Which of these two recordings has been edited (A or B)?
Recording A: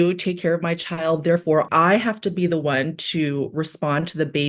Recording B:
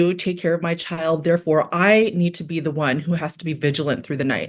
A